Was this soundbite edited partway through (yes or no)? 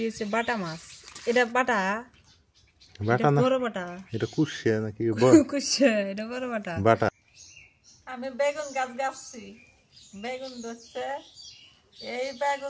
yes